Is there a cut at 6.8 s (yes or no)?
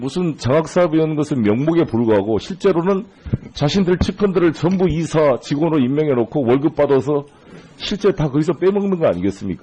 no